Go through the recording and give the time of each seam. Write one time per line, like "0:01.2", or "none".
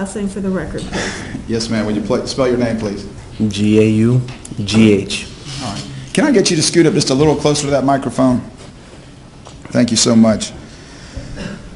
0:02.1